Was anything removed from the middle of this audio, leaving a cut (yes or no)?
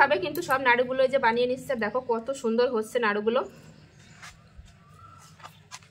no